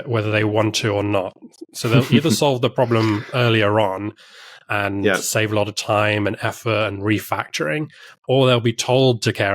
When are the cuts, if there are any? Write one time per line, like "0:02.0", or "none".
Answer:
none